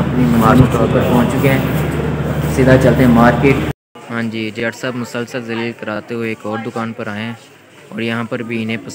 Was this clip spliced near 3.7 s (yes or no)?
yes